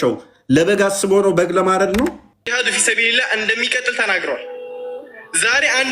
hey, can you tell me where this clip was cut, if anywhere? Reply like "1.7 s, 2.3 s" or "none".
2.4 s